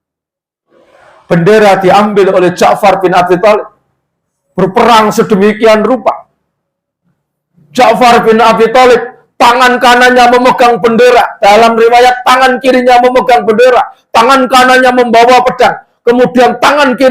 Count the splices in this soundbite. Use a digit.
0